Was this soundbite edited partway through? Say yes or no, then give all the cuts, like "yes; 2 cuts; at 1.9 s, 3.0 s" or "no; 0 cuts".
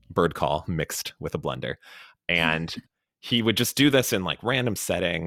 no; 0 cuts